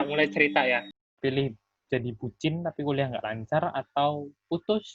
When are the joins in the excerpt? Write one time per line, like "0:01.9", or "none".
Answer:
0:00.9

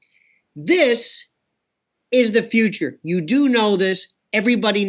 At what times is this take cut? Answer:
none

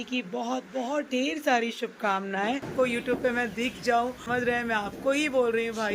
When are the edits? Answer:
0:02.7
0:04.3

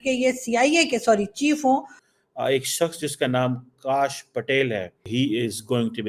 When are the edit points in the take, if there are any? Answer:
0:02.0
0:05.0

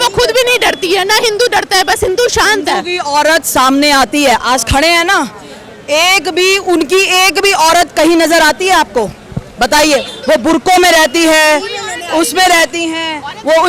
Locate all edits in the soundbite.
none

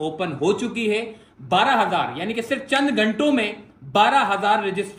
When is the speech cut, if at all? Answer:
none

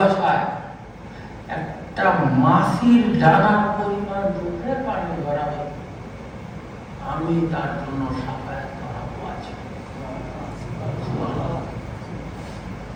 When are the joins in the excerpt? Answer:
none

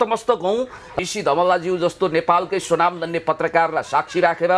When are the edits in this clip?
0:00.9

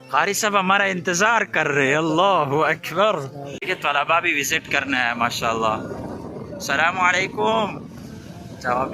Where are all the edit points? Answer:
0:03.6

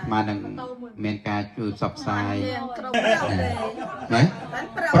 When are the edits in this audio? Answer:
0:02.9

